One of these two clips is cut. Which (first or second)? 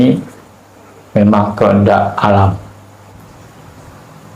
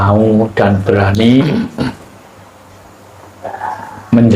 first